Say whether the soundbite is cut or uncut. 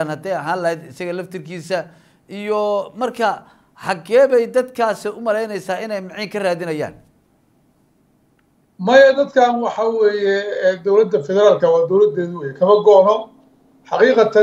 uncut